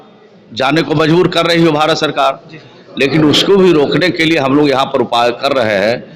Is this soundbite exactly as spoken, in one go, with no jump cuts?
yes; 0 cuts

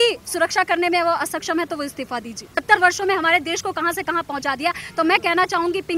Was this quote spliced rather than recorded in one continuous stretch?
yes; 1 cut; at 2.6 s

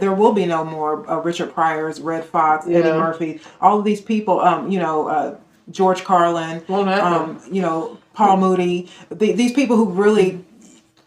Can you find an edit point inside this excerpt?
no; 0 cuts

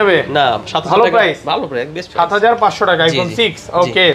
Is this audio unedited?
yes; 0 cuts

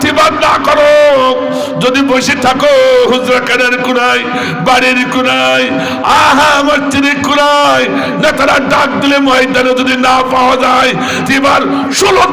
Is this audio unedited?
yes; 0 cuts

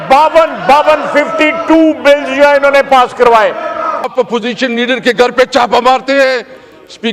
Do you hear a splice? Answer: yes; 1 cut; at 4.1 s

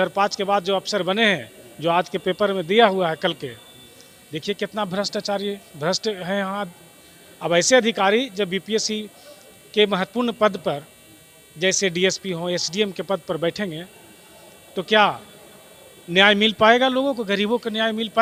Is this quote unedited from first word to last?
yes; 0 cuts

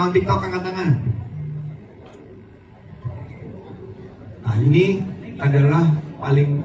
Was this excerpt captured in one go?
yes; 0 cuts

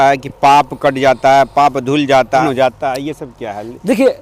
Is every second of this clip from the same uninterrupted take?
no; 1 cut; at 2.4 s

